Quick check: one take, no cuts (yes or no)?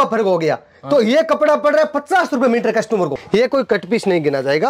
no